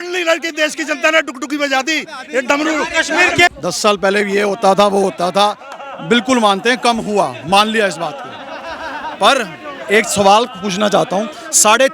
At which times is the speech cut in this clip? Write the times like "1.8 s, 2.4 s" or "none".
none